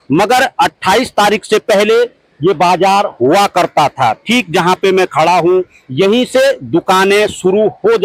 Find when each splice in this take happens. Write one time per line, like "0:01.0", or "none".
none

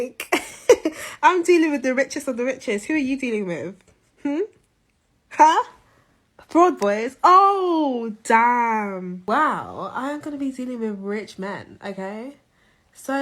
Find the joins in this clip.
0:09.2

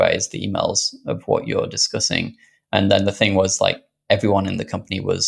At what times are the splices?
none

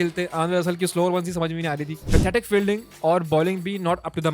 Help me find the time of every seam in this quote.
0:01.9

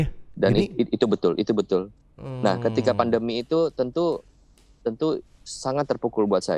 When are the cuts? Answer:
none

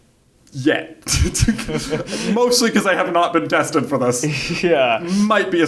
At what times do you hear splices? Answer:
none

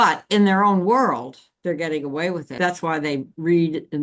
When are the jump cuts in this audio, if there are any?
0:02.6

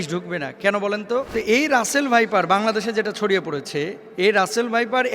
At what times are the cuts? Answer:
0:01.3
0:04.0

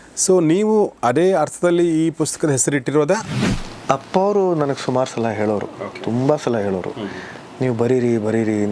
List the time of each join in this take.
0:03.3

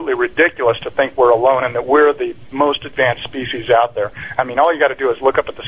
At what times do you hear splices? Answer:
none

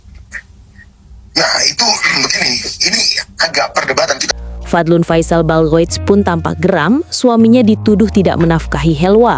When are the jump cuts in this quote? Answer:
0:04.2

